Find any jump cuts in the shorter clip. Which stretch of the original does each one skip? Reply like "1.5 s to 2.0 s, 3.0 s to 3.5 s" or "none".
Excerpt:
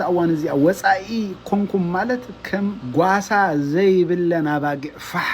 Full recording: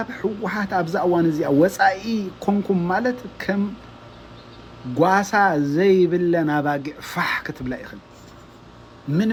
3.8 s to 4.8 s

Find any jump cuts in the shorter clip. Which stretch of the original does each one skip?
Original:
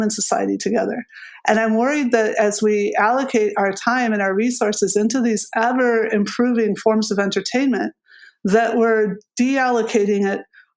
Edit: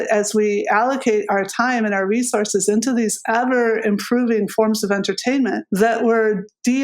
7.9 s to 8.4 s

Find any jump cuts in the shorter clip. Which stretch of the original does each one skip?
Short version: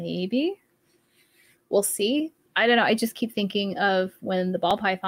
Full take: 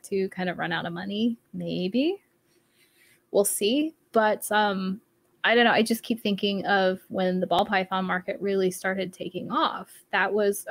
4.0 s to 5.3 s

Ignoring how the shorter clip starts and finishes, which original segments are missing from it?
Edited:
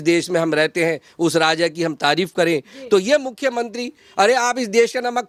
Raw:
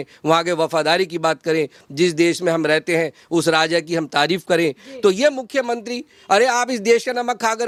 none

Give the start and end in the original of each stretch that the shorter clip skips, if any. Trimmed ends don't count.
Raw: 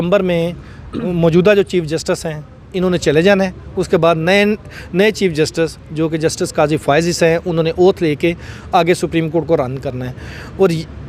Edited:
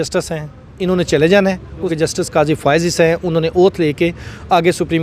3.8 s to 6.1 s

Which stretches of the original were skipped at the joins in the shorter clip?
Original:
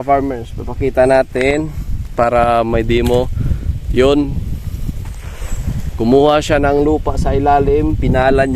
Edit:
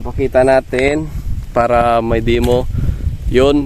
none

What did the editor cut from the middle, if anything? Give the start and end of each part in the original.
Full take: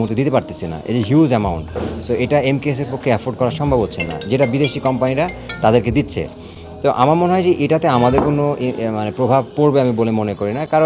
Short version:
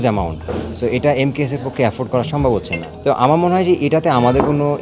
4.1 s to 6.6 s

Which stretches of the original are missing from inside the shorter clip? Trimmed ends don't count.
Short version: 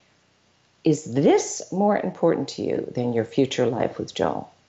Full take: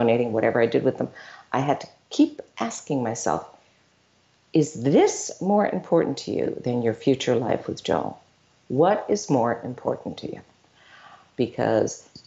none

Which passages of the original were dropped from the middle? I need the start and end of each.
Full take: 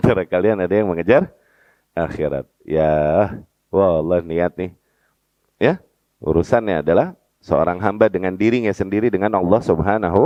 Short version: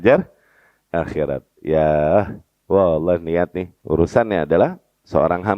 4.7 s to 6.0 s

